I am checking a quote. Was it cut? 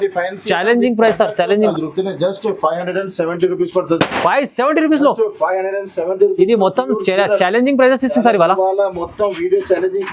yes; 1 cut; at 1.7 s

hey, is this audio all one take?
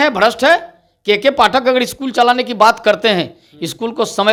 yes; 0 cuts

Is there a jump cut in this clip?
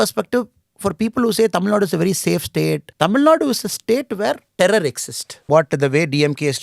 yes; 3 cuts; at 2.9 s, 4.5 s, 5.5 s

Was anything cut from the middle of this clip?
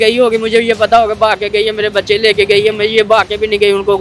no; 0 cuts

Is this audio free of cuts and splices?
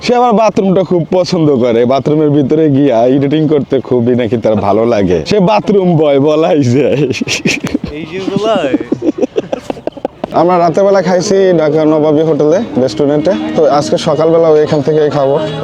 yes; 0 cuts

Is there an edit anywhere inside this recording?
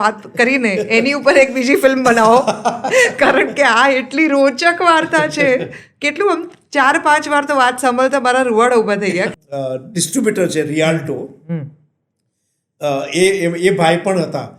yes; 1 cut; at 9.3 s

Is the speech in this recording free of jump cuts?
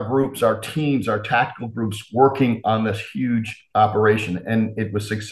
yes; 0 cuts

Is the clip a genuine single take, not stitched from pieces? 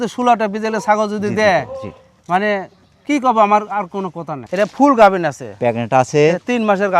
no; 1 cut; at 4.4 s

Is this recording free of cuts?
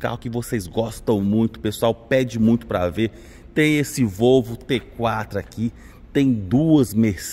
yes; 0 cuts

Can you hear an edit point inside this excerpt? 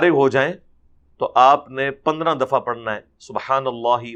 no; 0 cuts

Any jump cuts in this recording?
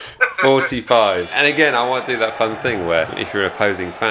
yes; 2 cuts; at 1.3 s, 3.2 s

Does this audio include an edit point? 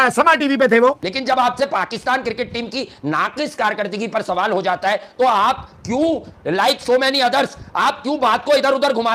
yes; 1 cut; at 1.1 s

